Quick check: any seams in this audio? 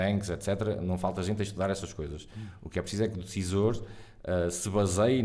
no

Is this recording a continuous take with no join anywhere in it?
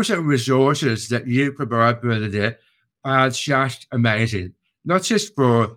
yes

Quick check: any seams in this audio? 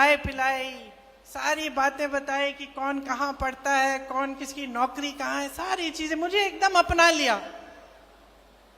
no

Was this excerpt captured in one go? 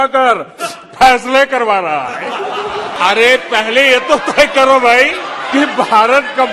no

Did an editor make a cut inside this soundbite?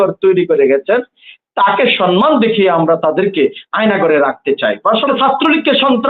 yes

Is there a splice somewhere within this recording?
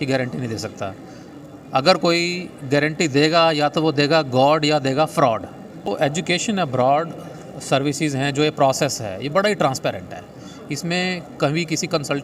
yes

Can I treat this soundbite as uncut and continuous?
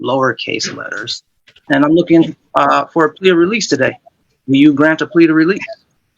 no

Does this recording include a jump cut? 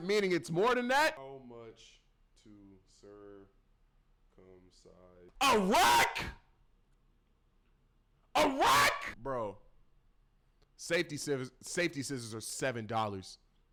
no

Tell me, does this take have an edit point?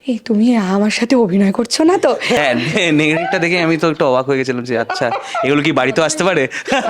yes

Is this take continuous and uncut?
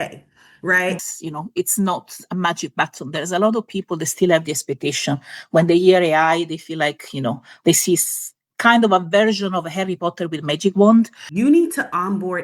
no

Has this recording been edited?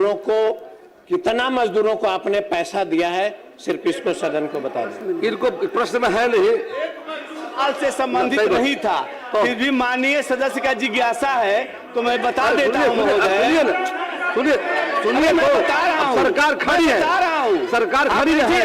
no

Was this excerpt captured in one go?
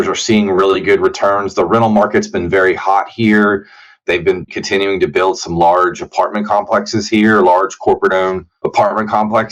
yes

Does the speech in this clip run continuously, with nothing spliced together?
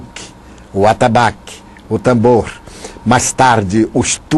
yes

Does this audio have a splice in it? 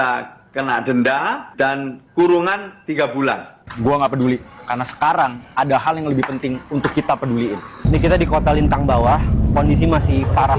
no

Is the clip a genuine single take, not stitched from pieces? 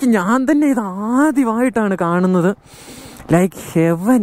yes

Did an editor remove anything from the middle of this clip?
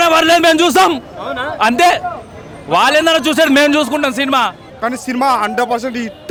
no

